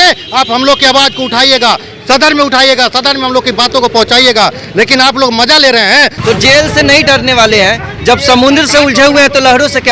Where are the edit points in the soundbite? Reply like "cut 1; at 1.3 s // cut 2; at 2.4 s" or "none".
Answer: cut 1; at 6.2 s